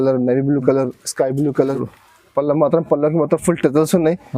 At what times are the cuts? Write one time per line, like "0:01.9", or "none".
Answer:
0:01.8